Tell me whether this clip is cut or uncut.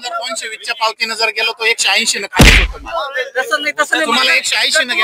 uncut